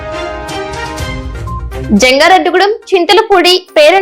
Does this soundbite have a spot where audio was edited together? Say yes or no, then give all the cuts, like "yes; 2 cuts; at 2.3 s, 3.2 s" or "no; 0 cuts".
yes; 1 cut; at 1.8 s